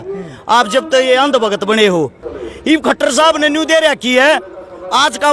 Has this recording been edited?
yes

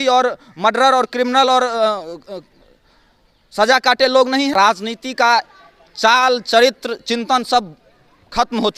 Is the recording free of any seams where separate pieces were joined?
no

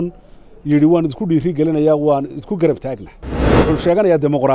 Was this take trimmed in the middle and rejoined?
yes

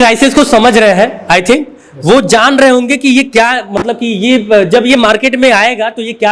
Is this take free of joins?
yes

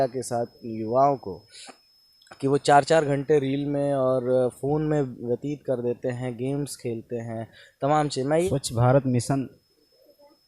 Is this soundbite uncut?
no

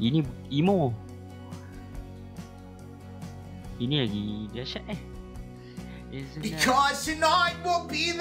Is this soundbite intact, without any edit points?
no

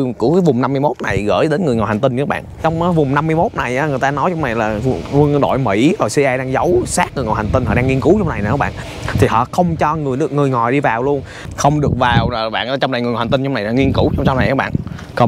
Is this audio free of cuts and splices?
no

